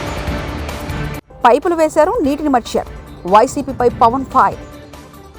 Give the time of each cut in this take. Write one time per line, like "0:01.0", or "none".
none